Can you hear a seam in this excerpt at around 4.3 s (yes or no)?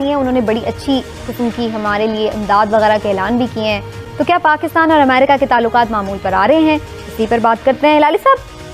yes